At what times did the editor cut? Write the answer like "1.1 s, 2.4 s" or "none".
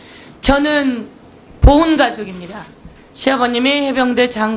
none